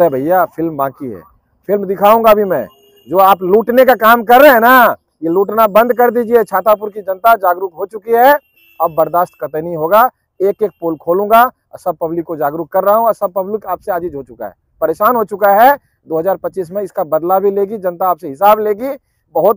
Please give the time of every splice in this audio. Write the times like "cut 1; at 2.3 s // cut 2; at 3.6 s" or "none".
none